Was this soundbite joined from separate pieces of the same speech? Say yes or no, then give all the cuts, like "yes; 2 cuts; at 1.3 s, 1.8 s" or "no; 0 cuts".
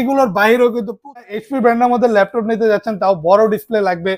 yes; 1 cut; at 1.3 s